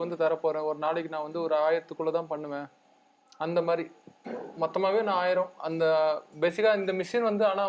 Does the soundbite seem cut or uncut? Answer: uncut